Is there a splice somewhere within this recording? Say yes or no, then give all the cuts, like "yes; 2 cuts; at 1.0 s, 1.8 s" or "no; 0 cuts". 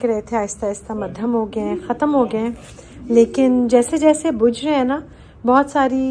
no; 0 cuts